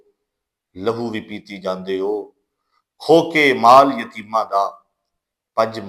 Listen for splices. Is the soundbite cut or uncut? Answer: uncut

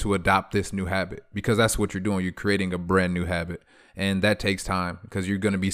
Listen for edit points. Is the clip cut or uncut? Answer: uncut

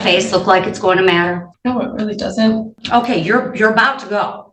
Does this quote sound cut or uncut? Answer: cut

